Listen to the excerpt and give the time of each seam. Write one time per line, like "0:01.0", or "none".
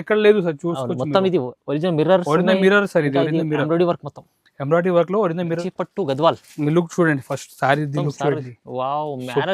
0:05.7